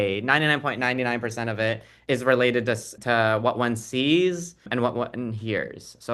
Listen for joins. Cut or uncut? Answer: cut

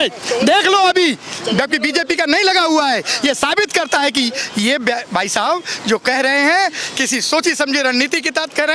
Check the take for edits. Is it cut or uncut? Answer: uncut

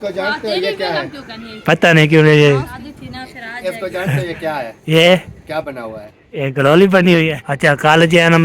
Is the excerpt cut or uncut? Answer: cut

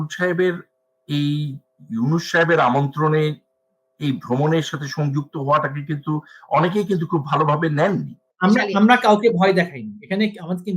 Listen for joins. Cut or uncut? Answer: cut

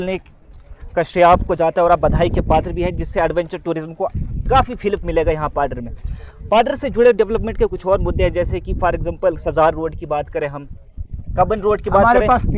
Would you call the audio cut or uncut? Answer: uncut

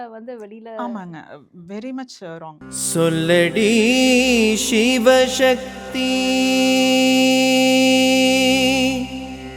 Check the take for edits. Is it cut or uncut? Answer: cut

